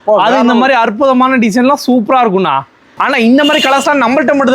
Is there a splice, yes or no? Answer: yes